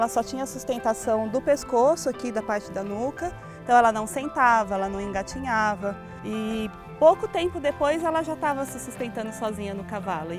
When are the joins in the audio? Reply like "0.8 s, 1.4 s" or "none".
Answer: 6.1 s

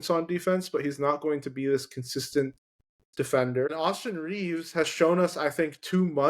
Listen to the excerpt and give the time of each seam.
3.7 s

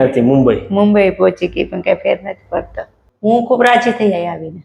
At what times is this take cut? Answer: 3.1 s

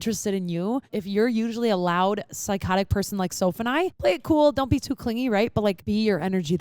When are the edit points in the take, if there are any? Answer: 1.0 s, 3.9 s, 5.8 s

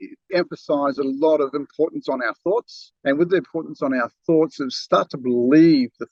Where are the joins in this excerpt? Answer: none

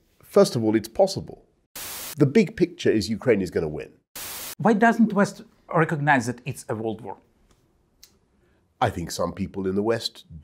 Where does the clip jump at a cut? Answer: 2.1 s, 4.3 s

